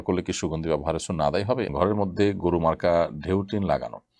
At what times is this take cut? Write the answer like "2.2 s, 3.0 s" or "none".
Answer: 1.7 s